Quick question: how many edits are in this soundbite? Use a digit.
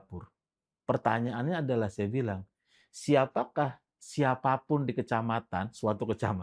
0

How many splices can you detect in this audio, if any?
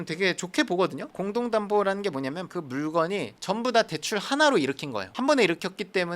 2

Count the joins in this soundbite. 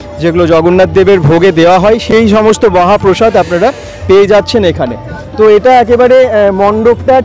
0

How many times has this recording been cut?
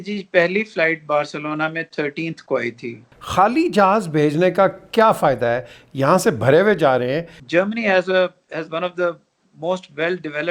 2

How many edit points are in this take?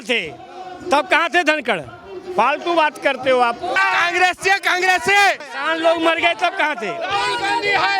2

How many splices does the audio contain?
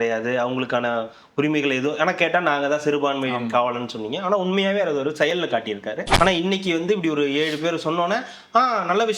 1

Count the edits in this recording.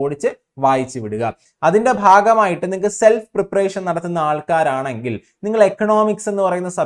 1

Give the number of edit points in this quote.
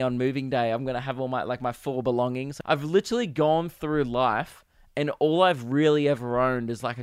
1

